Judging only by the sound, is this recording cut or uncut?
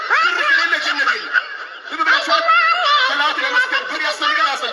uncut